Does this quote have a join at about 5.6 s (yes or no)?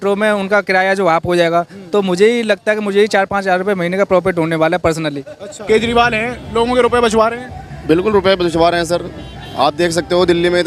yes